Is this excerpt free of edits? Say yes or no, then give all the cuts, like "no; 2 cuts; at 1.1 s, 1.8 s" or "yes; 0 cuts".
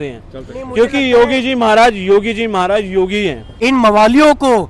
no; 1 cut; at 3.4 s